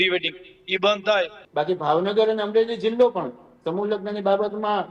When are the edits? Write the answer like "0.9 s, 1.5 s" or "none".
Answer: 1.4 s